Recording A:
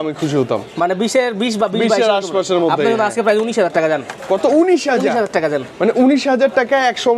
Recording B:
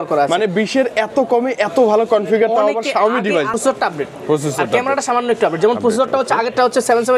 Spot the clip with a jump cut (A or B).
B